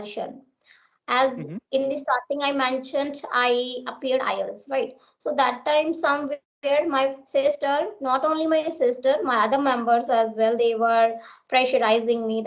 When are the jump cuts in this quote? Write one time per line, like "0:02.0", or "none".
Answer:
none